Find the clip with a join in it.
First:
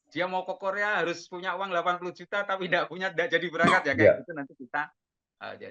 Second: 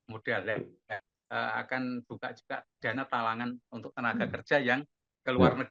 second; 1 cut; at 1.1 s

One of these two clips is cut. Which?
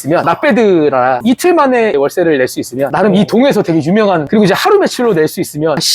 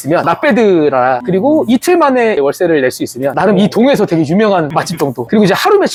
first; 2 cuts; at 1.2 s, 4.2 s

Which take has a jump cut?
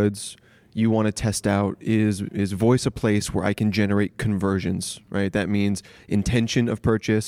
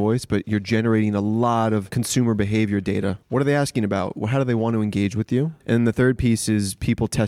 second; 3 cuts; at 2.0 s, 3.2 s, 5.6 s

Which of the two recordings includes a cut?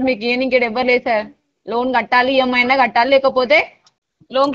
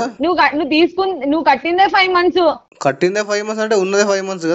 second; 1 cut; at 2.7 s

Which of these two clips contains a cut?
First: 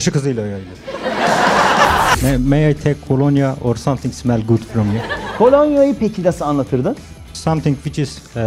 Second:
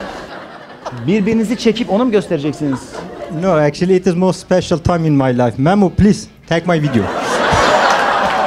first; 2 cuts; at 2.2 s, 7.3 s

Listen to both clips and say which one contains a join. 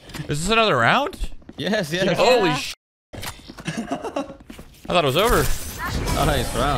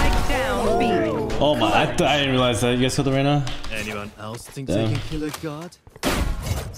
first; 1 cut; at 5.8 s

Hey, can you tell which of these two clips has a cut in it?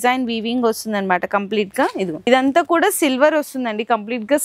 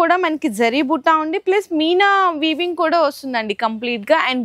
first; 1 cut; at 2.3 s

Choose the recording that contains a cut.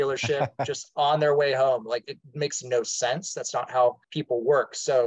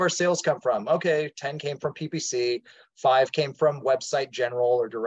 first; 1 cut; at 4.1 s

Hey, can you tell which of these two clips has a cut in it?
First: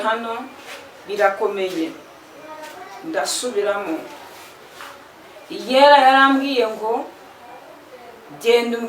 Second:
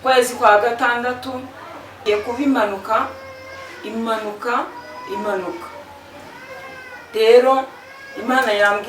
second; 1 cut; at 2.0 s

